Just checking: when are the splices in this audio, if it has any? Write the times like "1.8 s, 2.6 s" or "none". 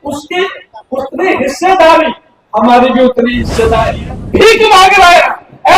4.1 s